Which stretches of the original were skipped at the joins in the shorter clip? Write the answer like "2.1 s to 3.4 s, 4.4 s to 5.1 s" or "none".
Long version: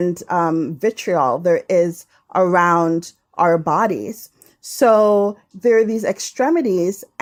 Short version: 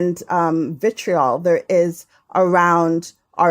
none